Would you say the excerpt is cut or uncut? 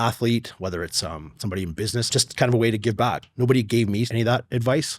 cut